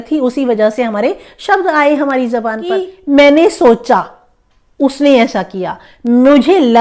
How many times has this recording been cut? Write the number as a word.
one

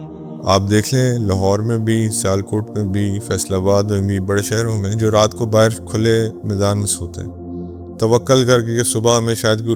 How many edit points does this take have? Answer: zero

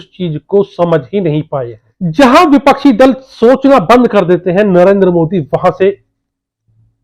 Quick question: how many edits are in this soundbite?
one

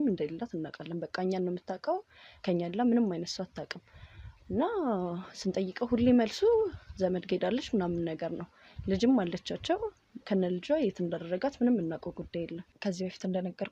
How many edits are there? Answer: one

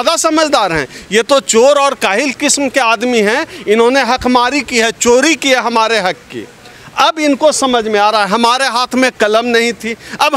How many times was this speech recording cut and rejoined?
zero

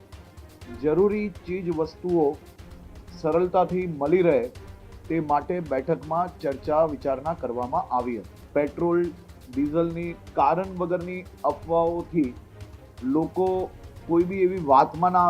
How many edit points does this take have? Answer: one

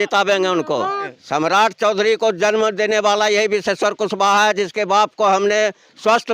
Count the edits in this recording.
one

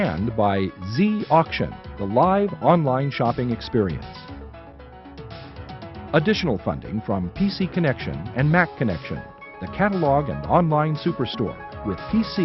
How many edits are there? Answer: two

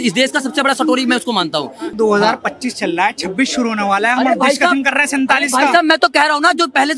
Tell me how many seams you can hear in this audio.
one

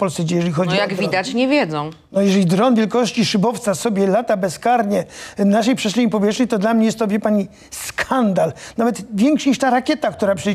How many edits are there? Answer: zero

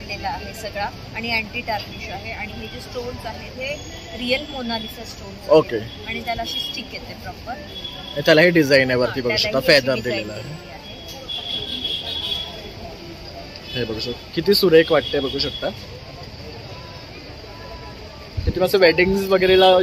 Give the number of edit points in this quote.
zero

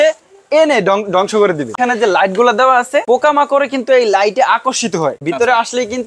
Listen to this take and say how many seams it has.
three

